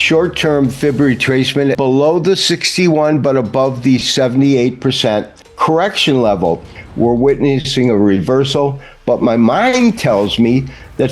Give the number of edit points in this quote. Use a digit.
3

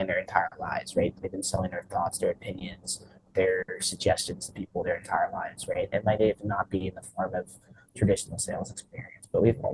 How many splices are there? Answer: 0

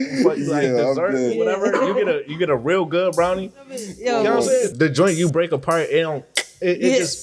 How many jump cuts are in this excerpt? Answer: 2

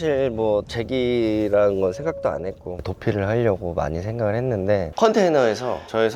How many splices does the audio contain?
2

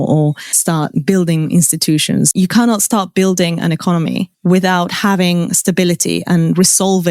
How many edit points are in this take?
1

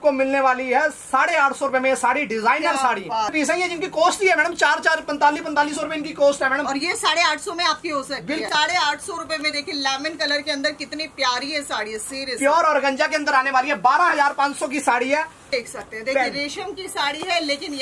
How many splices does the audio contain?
3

